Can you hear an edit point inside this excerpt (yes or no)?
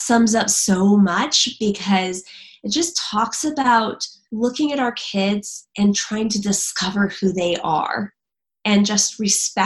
yes